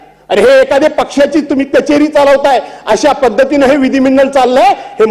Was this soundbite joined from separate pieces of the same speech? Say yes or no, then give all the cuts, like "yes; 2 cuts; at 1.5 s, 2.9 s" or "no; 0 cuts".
no; 0 cuts